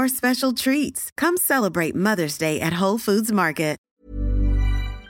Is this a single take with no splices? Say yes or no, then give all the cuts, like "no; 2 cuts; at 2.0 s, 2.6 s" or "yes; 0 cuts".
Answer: no; 1 cut; at 3.9 s